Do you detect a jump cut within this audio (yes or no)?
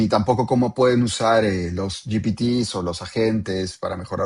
no